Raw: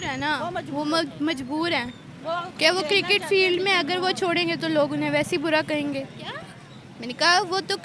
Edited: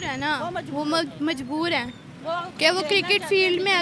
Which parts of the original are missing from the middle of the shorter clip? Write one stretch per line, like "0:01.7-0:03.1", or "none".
none